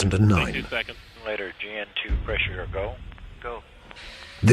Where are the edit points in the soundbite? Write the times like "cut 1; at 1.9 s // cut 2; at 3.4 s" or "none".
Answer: cut 1; at 1.1 s